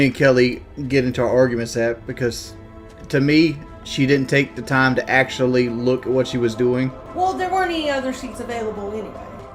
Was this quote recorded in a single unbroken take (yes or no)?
yes